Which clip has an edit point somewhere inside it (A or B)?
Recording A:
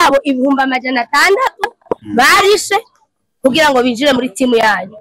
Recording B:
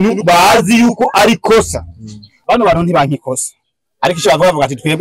B